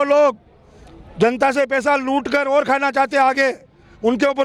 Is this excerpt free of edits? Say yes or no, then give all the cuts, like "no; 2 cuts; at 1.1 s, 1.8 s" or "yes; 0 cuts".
yes; 0 cuts